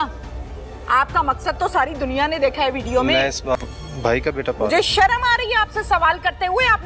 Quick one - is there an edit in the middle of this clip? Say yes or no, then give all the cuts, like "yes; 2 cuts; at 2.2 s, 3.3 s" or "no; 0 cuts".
yes; 1 cut; at 3.6 s